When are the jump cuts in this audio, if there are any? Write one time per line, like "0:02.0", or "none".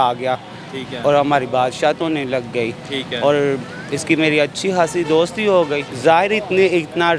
0:05.9